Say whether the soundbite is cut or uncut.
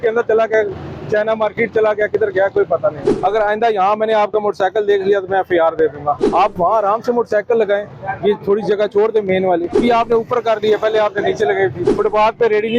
cut